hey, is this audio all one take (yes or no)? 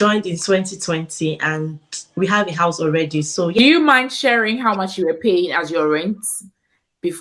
no